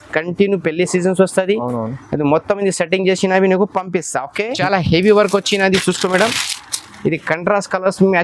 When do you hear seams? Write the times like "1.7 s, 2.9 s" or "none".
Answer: 4.5 s